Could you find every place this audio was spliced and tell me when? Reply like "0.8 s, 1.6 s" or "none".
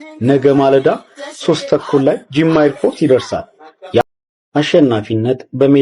4.0 s